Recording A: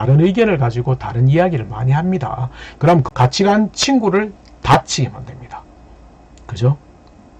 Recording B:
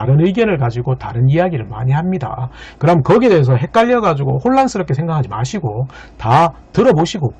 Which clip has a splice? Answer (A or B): A